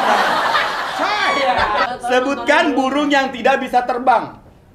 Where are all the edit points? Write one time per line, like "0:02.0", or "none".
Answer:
0:01.9